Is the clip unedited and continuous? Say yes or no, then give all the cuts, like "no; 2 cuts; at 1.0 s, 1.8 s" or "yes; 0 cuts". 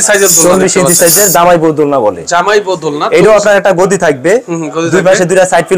yes; 0 cuts